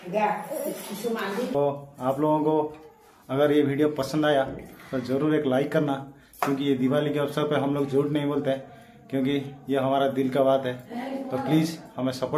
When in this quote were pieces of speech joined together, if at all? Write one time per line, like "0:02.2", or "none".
0:01.0

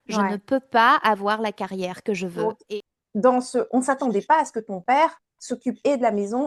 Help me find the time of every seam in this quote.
0:02.6

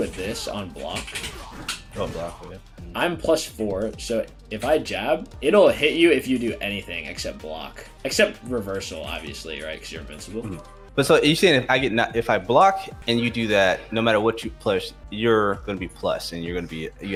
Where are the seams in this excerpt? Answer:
none

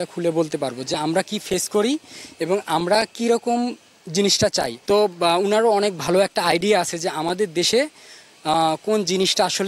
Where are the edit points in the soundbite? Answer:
0:04.8

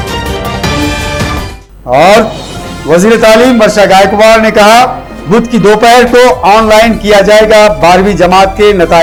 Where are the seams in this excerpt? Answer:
none

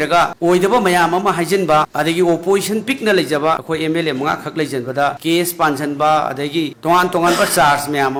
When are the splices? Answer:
none

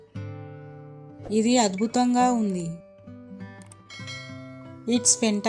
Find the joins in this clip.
0:01.3
0:02.8
0:04.3

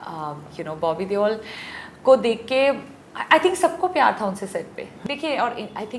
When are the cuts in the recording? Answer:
0:04.9

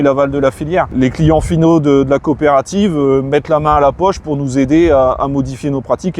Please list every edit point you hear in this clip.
0:00.9

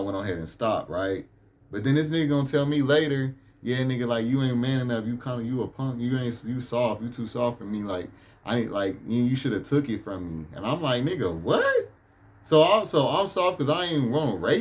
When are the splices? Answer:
none

